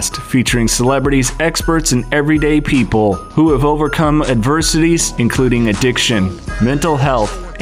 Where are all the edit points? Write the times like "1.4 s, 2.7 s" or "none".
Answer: none